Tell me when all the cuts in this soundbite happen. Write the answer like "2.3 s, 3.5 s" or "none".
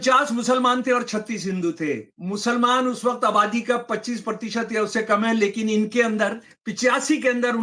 2.1 s